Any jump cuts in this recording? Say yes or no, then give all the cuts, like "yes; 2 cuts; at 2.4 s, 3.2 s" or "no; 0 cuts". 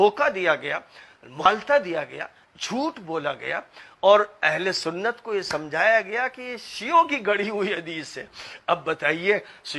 yes; 1 cut; at 1.4 s